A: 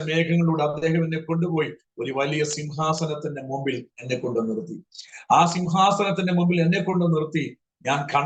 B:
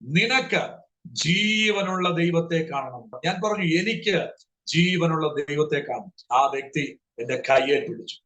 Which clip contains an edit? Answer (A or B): B